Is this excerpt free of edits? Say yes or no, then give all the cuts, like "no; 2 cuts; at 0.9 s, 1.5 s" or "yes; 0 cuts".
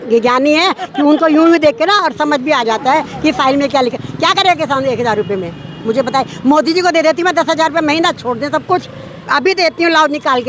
no; 1 cut; at 4.0 s